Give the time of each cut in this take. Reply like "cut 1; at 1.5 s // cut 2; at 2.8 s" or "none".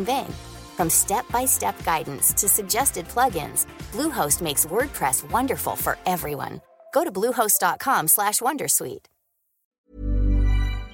cut 1; at 9.9 s